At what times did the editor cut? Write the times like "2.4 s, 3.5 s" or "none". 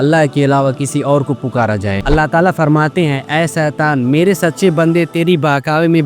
2.0 s